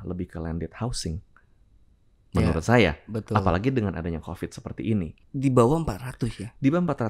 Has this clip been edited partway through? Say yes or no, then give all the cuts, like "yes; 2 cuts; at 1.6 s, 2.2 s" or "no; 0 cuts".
yes; 1 cut; at 5.1 s